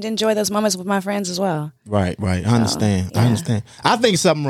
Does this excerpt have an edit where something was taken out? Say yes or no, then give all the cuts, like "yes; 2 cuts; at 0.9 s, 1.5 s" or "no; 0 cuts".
no; 0 cuts